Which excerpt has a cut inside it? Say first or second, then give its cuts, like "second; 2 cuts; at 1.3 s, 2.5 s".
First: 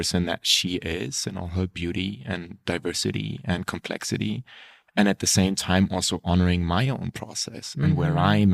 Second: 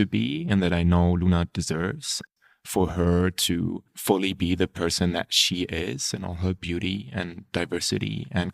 second; 2 cuts; at 2.2 s, 3.9 s